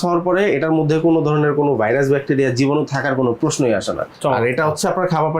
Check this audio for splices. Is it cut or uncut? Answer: cut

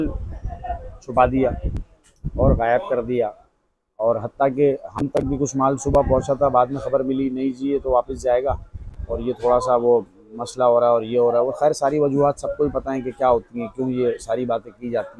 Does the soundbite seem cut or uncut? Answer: uncut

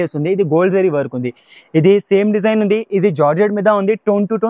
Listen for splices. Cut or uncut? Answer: uncut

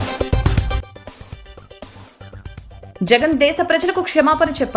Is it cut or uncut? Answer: uncut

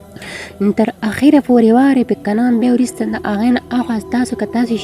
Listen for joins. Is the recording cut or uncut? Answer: uncut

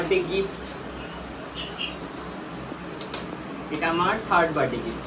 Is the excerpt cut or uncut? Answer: uncut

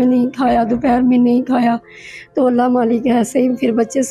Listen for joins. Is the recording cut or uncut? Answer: uncut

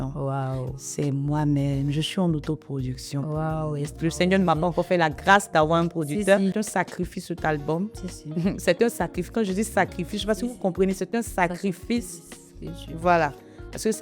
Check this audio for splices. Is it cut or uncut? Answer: cut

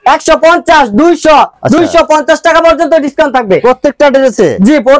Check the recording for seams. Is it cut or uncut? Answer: uncut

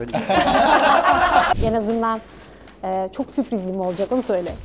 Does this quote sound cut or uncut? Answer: cut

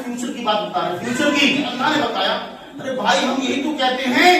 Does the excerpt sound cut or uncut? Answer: cut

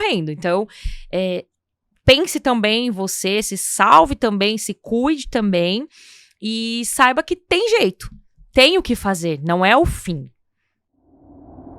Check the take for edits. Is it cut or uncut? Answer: cut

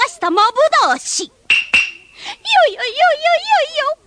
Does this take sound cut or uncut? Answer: uncut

